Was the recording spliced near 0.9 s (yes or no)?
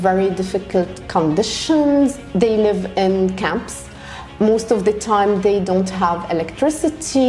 no